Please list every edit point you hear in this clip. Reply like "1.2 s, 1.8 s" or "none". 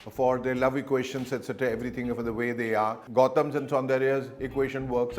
3.0 s